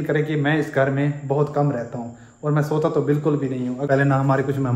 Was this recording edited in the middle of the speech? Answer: yes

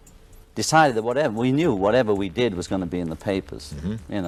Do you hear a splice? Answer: no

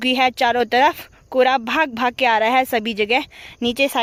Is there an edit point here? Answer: no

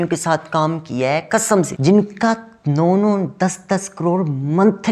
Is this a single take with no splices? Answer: no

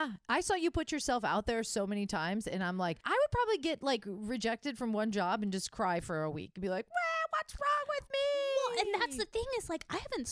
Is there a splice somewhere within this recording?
no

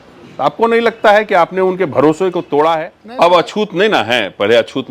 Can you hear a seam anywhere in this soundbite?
yes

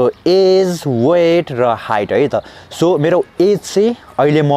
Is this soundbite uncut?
yes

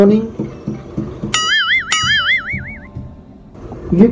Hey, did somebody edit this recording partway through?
no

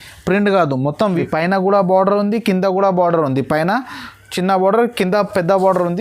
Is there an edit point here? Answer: yes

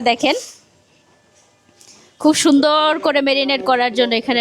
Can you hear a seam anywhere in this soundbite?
no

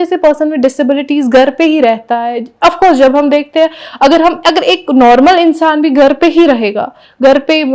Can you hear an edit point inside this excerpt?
no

